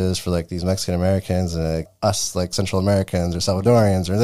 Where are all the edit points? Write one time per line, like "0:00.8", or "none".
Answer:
0:01.9